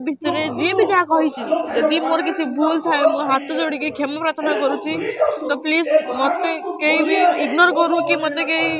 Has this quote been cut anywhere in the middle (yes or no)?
no